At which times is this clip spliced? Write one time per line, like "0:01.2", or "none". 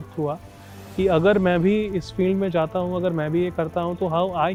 none